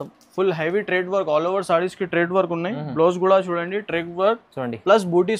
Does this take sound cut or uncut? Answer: uncut